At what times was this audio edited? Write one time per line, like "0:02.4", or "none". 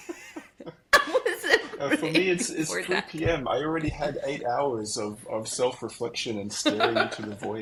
none